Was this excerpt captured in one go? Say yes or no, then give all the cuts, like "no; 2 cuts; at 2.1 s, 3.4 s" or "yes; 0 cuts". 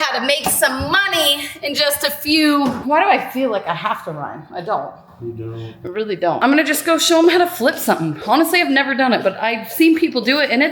no; 2 cuts; at 2.8 s, 6.4 s